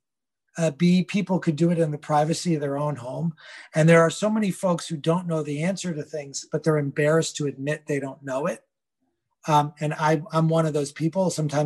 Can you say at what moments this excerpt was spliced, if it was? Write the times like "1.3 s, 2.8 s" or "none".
none